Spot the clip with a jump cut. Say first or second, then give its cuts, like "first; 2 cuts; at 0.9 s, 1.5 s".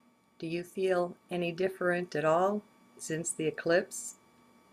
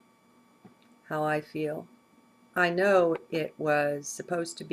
second; 1 cut; at 3.8 s